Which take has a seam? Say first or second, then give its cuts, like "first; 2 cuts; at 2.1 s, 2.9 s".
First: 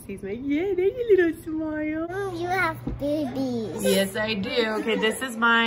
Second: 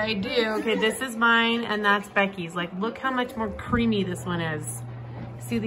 first; 1 cut; at 2.1 s